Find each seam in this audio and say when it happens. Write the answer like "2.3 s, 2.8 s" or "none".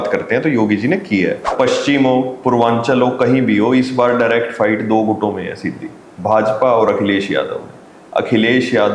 1.5 s

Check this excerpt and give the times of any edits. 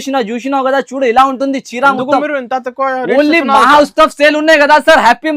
none

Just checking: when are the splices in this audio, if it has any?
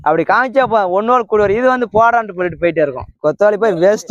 3.2 s

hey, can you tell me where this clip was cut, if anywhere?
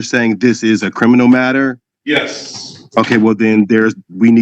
1.9 s

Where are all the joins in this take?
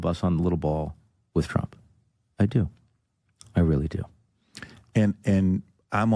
none

